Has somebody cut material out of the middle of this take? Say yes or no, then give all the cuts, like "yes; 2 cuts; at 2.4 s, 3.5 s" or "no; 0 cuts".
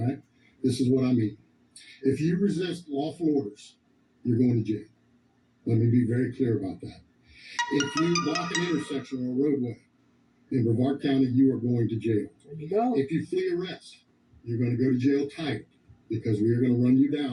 no; 0 cuts